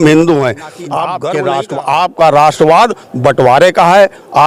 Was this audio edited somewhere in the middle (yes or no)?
yes